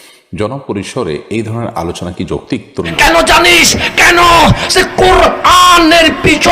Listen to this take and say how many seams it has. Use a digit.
1